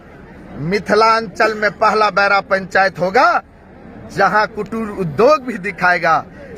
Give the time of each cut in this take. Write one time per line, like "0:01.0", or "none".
none